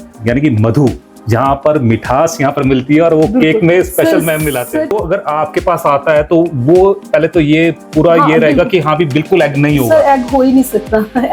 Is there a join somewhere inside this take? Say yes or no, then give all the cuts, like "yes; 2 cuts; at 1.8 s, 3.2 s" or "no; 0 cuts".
yes; 1 cut; at 4.9 s